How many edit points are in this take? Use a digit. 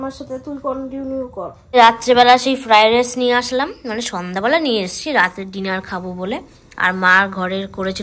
1